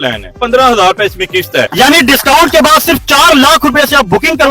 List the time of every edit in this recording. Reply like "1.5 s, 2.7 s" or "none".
1.7 s